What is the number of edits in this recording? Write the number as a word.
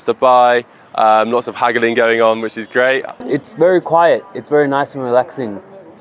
one